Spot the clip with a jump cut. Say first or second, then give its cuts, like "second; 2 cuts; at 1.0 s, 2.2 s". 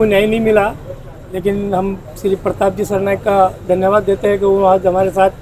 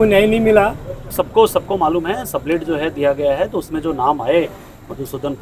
second; 1 cut; at 1.1 s